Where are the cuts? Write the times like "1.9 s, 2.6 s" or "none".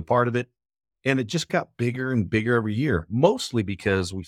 none